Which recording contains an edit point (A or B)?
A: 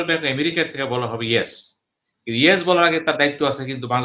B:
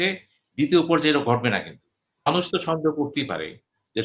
B